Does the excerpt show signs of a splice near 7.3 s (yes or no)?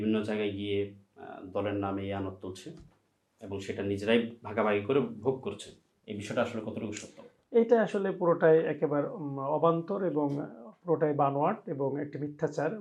no